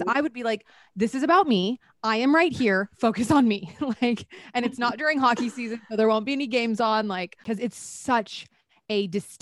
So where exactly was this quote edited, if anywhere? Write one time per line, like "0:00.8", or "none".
0:07.4